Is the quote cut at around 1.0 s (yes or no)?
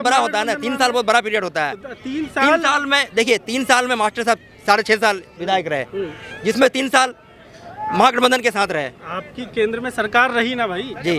no